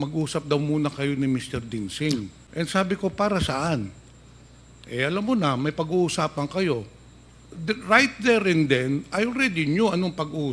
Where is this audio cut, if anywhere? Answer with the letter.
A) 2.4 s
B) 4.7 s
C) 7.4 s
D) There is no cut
A